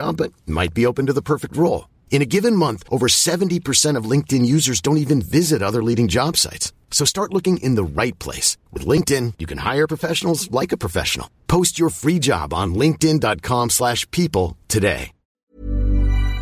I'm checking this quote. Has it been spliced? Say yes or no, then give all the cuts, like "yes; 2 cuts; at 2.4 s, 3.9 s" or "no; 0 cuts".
yes; 1 cut; at 15.3 s